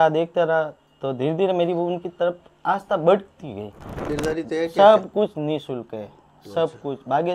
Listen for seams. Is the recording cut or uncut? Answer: cut